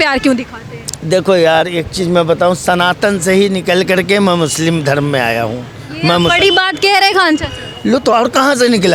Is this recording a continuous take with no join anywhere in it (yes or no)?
yes